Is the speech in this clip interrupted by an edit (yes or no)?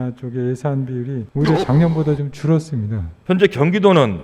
yes